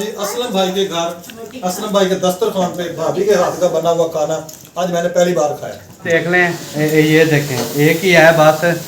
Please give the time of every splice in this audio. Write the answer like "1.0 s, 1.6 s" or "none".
6.0 s